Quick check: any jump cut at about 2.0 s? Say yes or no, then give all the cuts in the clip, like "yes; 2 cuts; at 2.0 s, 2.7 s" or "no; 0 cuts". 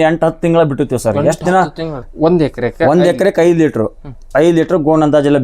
yes; 1 cut; at 2.0 s